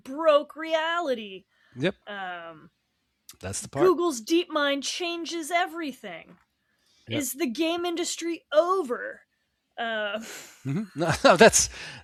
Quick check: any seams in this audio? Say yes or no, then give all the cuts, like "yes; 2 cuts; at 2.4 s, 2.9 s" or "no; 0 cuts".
no; 0 cuts